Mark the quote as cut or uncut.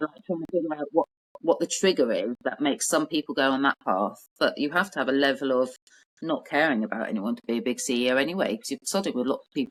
uncut